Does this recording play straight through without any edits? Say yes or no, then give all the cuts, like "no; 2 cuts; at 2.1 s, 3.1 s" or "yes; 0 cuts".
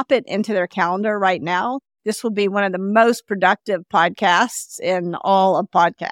no; 1 cut; at 1.9 s